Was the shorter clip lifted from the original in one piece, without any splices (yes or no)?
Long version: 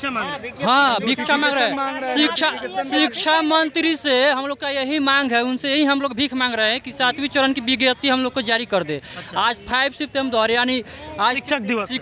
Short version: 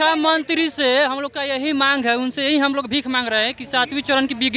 yes